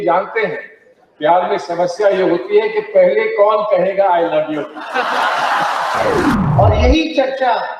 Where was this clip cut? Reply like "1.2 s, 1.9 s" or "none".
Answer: 6.4 s